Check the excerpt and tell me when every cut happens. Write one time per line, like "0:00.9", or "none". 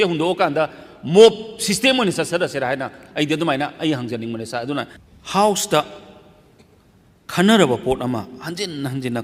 0:05.0